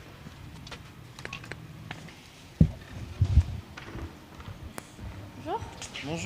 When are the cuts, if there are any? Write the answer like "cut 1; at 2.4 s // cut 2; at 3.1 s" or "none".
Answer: cut 1; at 3.6 s